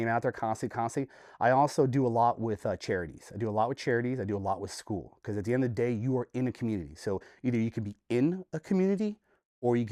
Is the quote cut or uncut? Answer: uncut